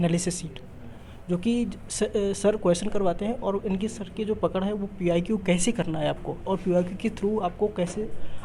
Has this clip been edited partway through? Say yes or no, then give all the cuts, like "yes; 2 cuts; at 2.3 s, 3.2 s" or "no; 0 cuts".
no; 0 cuts